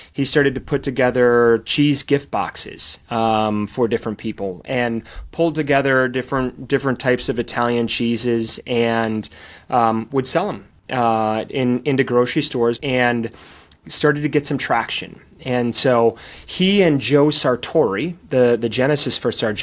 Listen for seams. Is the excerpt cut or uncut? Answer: cut